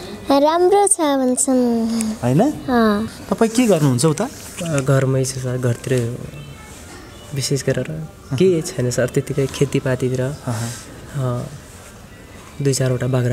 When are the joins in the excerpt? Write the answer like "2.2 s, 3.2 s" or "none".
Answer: 3.1 s